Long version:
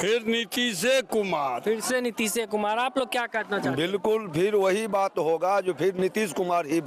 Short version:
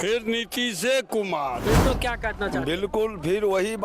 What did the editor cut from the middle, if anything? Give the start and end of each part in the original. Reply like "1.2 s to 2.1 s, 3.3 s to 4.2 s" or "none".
1.8 s to 2.9 s